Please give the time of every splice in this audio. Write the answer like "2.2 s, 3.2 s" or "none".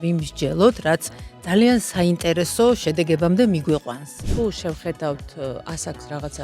4.2 s